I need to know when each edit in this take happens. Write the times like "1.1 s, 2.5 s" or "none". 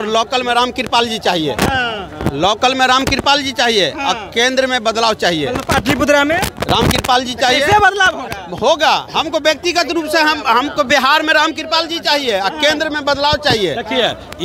none